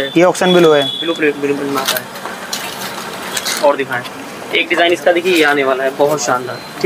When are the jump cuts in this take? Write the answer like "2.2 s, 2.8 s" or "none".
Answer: none